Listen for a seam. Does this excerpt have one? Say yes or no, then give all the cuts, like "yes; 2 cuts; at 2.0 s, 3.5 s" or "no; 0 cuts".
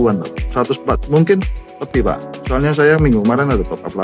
no; 0 cuts